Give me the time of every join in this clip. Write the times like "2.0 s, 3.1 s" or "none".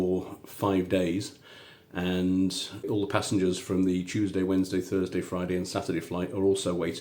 none